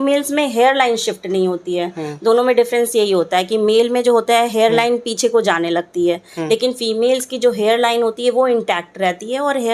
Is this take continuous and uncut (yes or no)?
yes